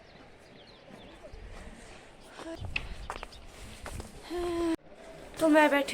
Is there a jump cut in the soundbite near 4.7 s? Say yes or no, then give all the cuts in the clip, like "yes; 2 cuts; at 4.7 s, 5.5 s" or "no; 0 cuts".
yes; 1 cut; at 4.7 s